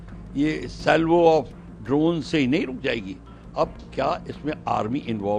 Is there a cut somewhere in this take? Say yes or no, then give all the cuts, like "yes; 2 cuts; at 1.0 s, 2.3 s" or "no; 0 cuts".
no; 0 cuts